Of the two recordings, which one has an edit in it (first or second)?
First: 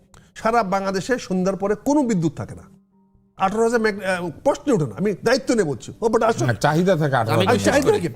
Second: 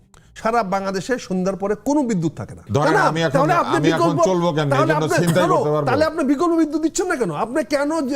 second